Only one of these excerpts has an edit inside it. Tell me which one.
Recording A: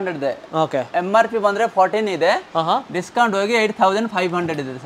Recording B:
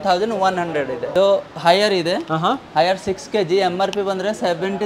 B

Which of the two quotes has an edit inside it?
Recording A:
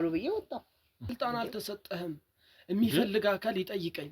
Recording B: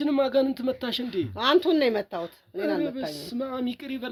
A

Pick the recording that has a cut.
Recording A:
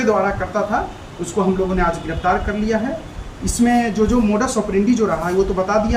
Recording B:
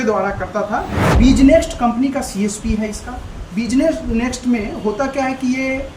B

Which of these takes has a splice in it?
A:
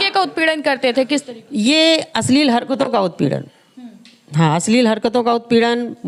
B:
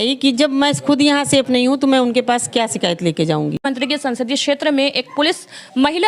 B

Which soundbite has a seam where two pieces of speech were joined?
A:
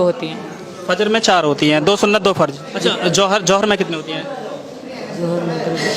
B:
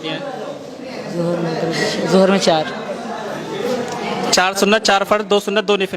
A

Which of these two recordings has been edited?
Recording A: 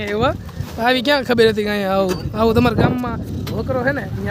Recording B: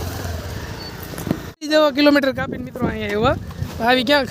B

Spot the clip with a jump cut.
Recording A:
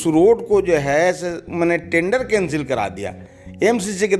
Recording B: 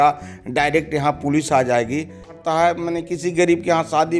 B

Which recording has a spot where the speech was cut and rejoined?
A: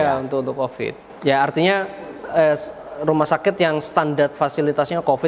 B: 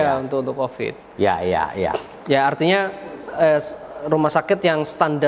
A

